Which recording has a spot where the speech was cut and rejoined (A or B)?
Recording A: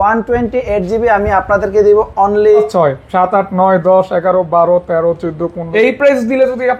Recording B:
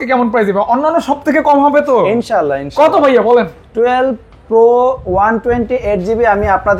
A